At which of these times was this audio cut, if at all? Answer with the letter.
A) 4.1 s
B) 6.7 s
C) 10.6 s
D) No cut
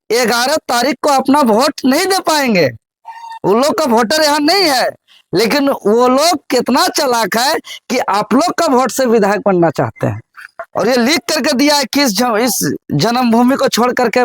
C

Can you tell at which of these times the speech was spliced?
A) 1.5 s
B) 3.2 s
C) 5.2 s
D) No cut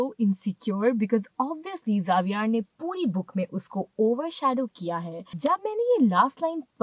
C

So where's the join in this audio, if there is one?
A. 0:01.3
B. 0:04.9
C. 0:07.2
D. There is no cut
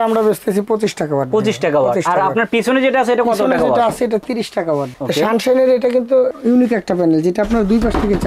B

